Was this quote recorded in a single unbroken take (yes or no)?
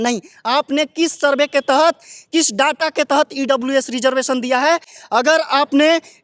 yes